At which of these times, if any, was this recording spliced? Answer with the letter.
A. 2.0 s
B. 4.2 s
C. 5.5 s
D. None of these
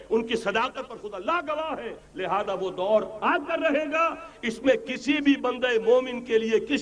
A